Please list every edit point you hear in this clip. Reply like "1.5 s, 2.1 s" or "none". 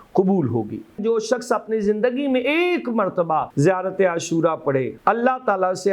1.0 s, 3.5 s, 4.9 s

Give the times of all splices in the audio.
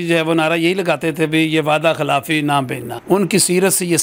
2.8 s

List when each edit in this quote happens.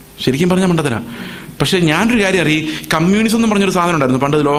none

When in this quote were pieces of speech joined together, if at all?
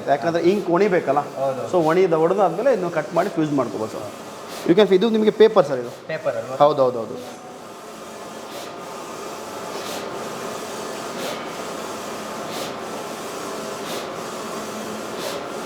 none

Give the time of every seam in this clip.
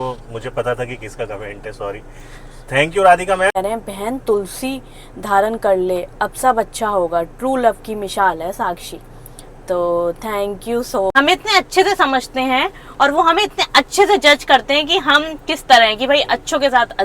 3.6 s, 11.1 s

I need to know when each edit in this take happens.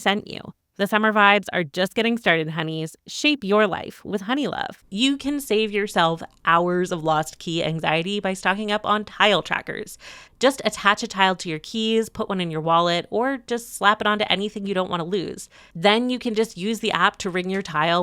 4.7 s

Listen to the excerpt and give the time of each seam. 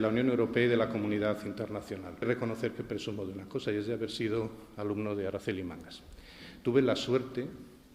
2.2 s

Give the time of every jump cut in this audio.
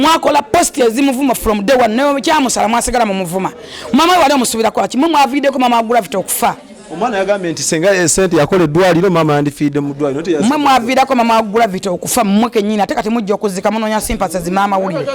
none

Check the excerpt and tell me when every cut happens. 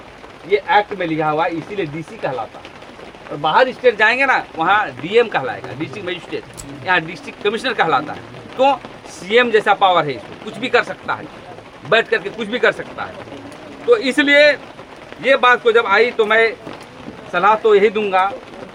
none

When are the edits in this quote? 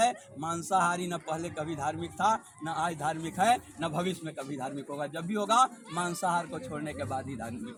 none

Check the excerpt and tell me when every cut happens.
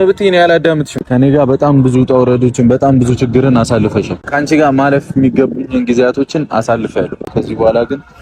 1.0 s, 4.3 s, 7.3 s

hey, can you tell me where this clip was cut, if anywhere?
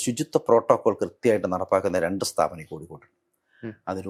none

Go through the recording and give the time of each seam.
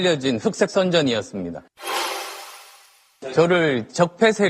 1.3 s

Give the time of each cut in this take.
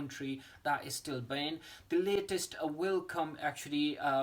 none

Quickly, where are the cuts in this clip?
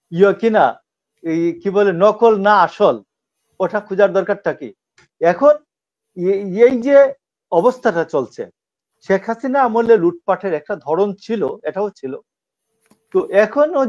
5.0 s

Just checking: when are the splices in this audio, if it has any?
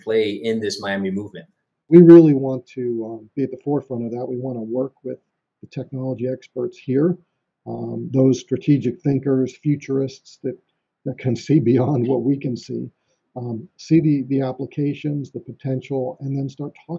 1.9 s

